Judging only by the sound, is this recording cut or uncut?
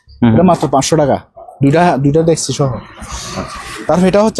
uncut